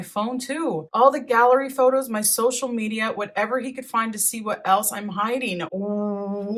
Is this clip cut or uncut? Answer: uncut